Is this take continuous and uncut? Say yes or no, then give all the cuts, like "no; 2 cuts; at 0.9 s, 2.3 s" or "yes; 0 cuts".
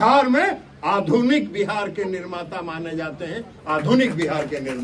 yes; 0 cuts